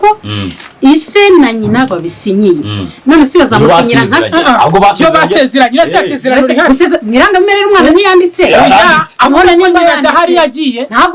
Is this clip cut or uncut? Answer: uncut